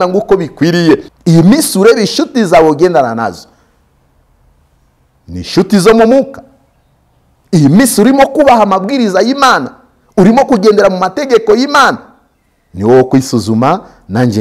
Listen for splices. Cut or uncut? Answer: cut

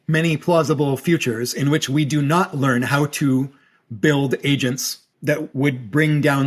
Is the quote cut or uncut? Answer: cut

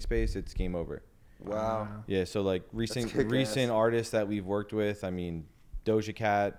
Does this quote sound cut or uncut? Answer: uncut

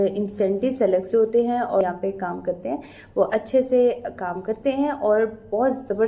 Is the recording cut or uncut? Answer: uncut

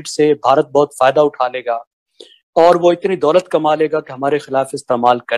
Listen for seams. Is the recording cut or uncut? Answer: uncut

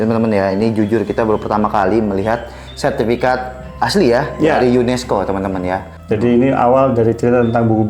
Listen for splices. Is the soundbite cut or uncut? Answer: cut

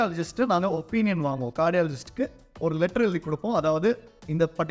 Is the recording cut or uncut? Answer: uncut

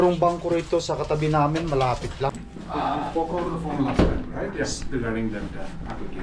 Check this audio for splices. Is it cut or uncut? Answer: cut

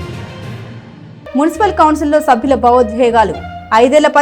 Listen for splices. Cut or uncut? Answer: cut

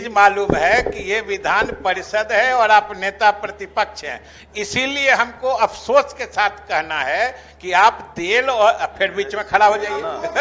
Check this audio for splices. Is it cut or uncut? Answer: uncut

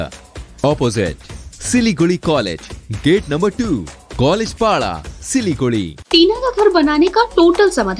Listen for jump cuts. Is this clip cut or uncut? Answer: cut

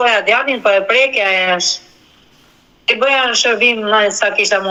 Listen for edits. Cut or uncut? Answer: uncut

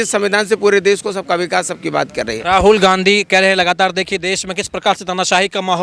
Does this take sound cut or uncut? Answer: uncut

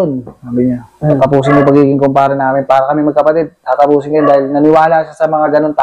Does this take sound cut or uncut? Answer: uncut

